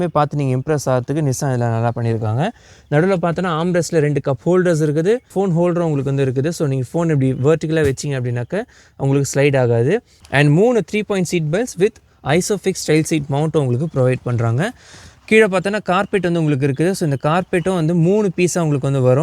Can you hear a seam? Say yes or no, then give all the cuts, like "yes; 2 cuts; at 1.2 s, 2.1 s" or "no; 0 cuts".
no; 0 cuts